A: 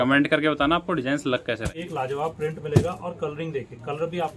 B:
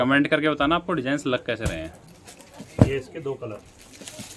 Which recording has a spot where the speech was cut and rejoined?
A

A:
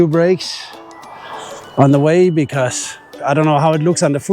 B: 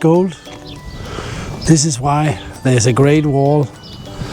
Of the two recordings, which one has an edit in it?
A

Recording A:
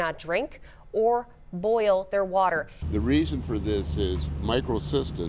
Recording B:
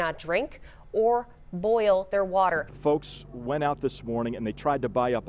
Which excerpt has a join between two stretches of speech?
B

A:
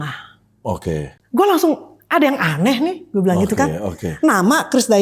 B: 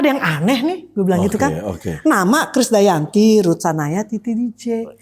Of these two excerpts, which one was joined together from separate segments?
A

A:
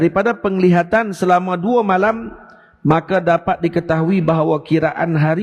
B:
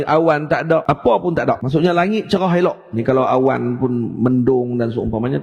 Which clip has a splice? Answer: B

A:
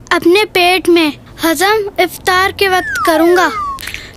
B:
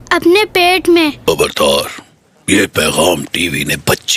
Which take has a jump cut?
B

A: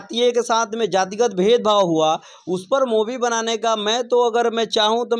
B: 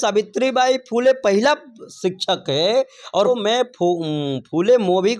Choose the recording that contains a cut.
B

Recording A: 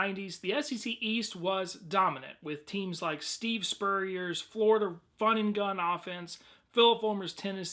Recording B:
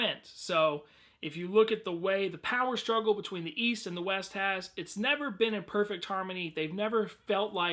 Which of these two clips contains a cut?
B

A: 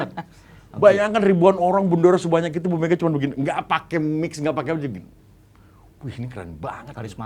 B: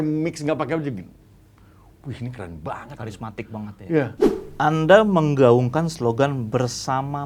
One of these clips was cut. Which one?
B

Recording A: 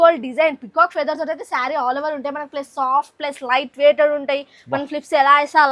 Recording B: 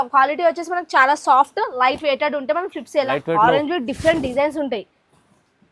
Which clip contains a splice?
B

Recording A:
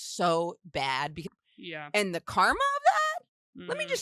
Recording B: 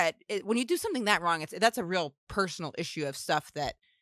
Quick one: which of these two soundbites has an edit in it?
A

